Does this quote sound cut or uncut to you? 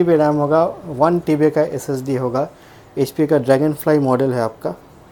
uncut